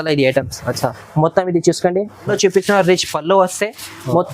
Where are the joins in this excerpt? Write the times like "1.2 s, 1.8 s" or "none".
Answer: 2.3 s